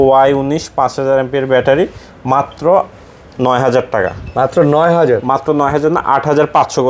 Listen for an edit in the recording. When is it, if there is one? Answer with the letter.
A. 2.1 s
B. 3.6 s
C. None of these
C